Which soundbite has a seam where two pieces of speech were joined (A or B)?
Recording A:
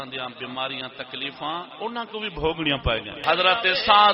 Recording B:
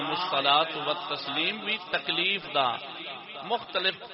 A